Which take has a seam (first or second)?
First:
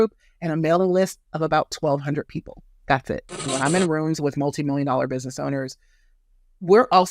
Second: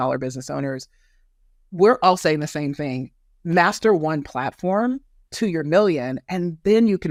first